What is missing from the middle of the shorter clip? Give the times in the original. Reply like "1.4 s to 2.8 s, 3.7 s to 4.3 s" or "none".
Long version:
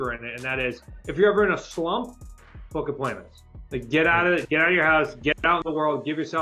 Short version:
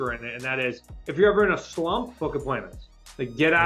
2.1 s to 2.6 s